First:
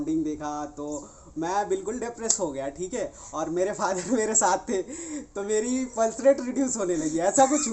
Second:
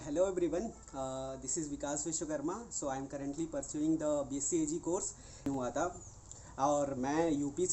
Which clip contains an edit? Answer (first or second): second